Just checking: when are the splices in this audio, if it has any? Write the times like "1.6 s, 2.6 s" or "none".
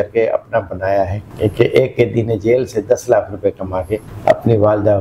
1.2 s, 4.0 s

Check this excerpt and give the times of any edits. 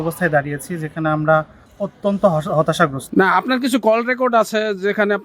3.0 s

